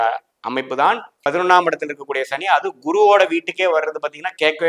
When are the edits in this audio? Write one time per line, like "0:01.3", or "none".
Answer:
none

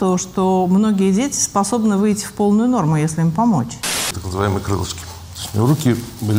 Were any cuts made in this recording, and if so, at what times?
0:04.2

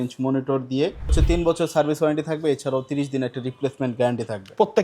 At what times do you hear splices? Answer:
0:01.2

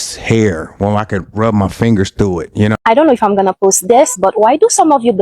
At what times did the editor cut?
0:02.8

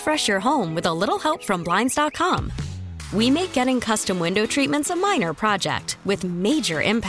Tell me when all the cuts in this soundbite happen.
none

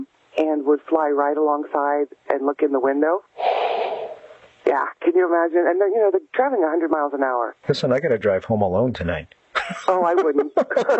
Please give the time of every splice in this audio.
none

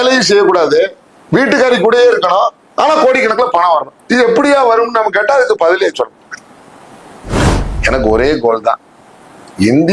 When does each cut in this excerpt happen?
0:07.4

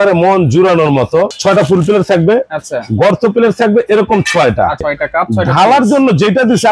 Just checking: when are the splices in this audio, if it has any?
0:01.3
0:04.8

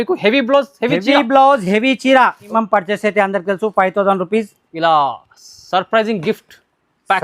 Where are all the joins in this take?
0:02.5

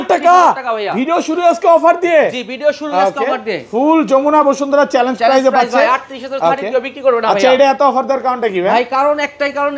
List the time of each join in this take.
none

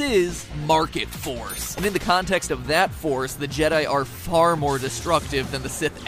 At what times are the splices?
0:02.1

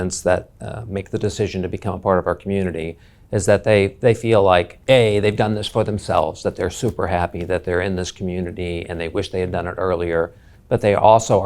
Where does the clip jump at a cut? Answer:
0:04.7

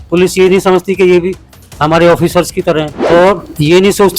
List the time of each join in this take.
0:03.1

